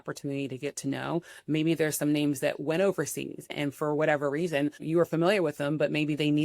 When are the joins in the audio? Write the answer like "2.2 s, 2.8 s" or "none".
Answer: 3.5 s, 4.8 s